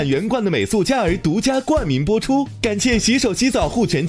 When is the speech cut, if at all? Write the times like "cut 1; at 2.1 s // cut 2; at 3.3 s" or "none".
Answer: cut 1; at 2.5 s